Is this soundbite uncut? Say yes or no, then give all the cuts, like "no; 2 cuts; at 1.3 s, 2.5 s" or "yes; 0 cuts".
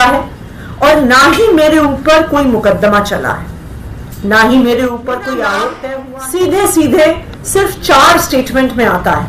no; 1 cut; at 5.9 s